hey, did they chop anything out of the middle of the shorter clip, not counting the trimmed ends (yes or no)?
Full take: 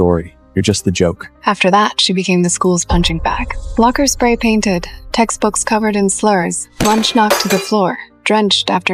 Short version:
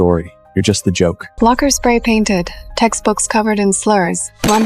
yes